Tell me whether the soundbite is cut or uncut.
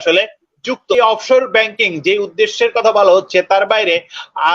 cut